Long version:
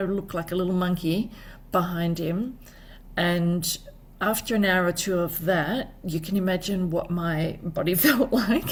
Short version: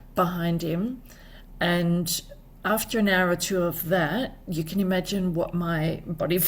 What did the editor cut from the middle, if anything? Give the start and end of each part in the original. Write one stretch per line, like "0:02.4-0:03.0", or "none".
none